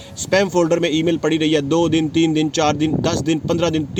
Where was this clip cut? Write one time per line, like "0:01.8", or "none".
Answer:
none